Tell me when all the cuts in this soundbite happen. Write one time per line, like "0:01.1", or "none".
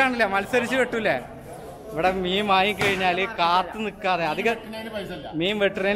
none